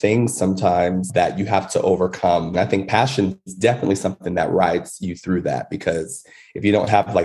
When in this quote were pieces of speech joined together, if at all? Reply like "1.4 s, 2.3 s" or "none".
2.5 s